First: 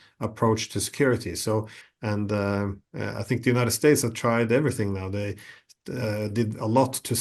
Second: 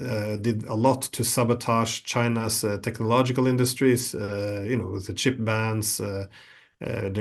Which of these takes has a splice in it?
first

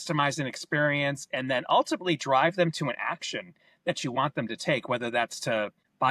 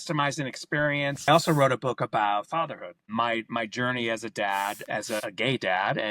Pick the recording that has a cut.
second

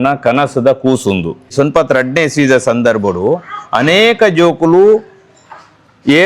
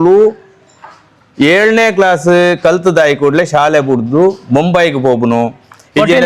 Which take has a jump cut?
first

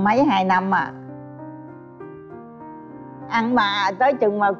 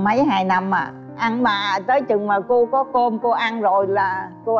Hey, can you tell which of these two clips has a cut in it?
second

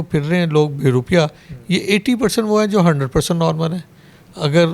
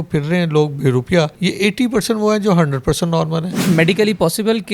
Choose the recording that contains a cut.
second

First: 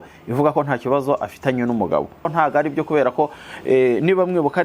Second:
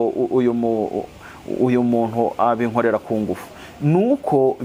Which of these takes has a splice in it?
first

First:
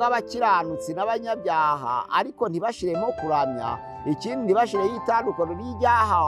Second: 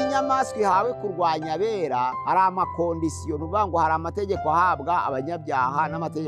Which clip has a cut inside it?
second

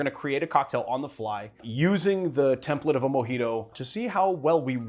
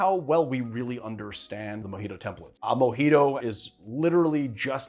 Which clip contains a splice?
second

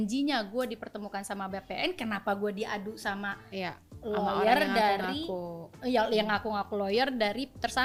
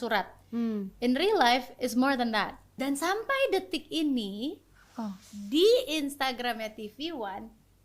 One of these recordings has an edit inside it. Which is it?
second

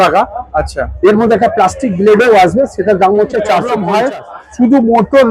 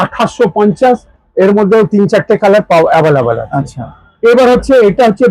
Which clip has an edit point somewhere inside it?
first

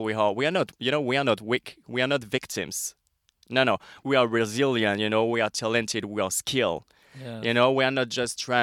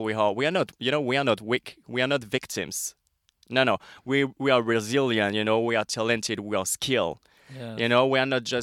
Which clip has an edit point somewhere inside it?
first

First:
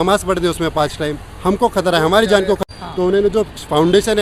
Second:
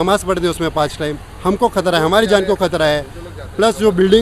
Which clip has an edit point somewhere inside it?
first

